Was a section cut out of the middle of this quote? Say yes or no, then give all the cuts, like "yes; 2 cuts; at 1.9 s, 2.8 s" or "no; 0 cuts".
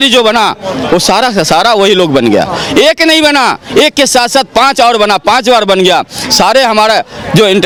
no; 0 cuts